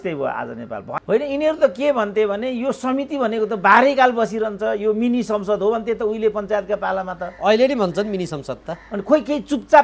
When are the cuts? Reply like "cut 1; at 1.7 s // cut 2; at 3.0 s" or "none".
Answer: cut 1; at 0.9 s